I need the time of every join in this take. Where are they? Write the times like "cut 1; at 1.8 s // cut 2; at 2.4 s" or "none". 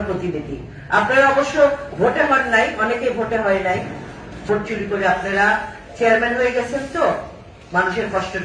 cut 1; at 4.4 s